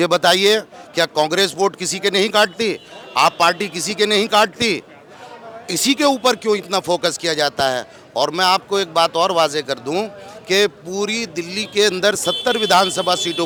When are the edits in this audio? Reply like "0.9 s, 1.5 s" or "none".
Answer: none

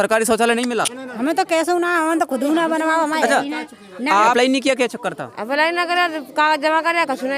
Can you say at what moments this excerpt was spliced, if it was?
4.3 s

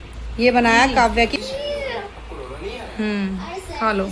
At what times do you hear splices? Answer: 1.3 s

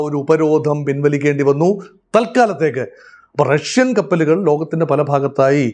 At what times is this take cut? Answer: none

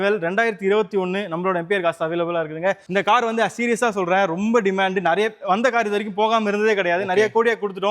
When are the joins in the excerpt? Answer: 2.8 s

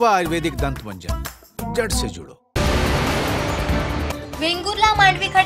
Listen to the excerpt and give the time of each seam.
2.1 s

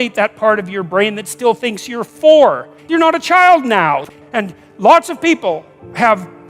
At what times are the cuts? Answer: 2.8 s, 4.2 s

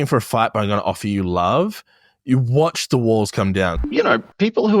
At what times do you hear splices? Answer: 3.8 s

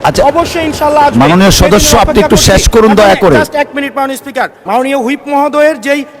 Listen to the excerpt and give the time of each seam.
4.6 s

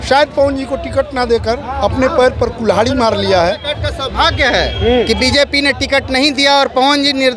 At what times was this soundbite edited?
3.6 s

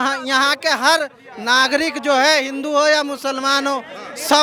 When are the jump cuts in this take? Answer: none

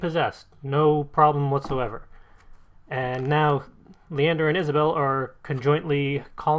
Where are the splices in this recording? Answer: 3.8 s

